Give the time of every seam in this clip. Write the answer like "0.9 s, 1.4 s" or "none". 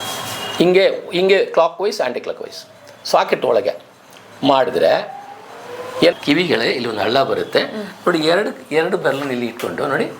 6.2 s